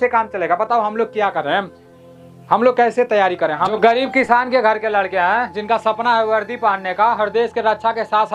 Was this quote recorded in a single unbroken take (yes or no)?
yes